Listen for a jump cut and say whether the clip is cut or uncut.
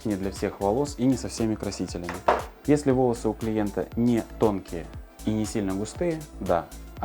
uncut